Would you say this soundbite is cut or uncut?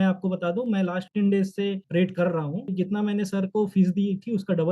cut